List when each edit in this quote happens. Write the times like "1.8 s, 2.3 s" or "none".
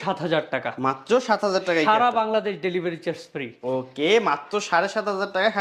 none